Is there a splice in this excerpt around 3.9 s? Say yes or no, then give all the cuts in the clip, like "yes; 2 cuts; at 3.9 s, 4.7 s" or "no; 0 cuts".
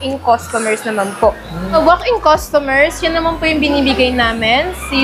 no; 1 cut; at 1.7 s